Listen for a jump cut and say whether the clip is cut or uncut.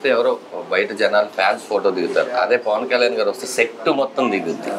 uncut